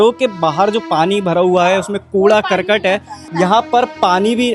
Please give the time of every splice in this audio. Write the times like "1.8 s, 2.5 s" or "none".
3.2 s